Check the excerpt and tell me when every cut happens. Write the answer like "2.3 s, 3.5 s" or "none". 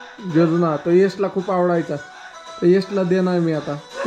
none